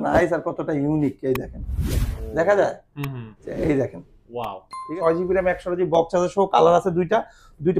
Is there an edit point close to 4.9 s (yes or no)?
yes